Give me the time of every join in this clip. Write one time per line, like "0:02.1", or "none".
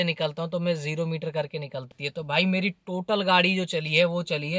0:01.9